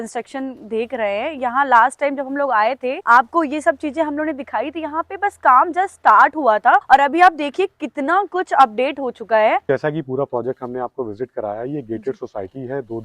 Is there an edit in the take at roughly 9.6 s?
yes; 3 cuts; at 2.9 s, 6.8 s, 9.6 s

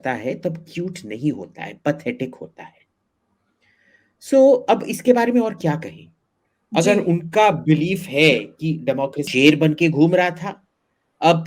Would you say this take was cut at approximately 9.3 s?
yes; 1 cut; at 9.3 s

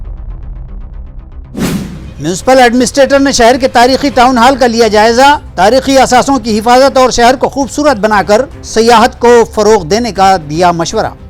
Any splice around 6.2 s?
no; 1 cut; at 2.0 s

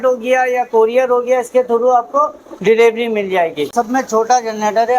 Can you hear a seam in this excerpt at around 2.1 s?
no; 1 cut; at 3.7 s

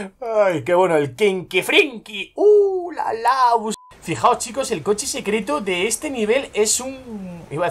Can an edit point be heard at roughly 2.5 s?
no; 1 cut; at 3.7 s

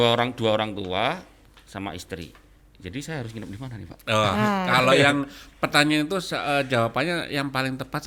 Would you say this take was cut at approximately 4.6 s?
no; 0 cuts

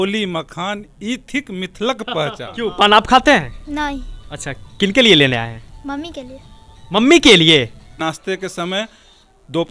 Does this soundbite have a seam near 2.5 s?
yes; 2 cuts; at 2.5 s, 8.0 s

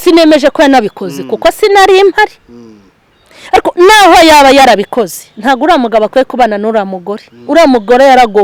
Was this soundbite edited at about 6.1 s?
no; 0 cuts

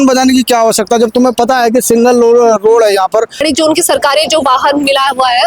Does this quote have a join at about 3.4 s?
yes; 1 cut; at 3.4 s

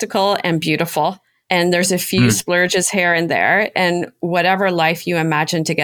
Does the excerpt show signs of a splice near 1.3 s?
yes; 1 cut; at 1.3 s

